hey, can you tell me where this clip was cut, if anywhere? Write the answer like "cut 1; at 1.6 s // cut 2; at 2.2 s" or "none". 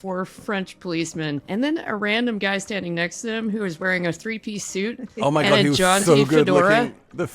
cut 1; at 1.4 s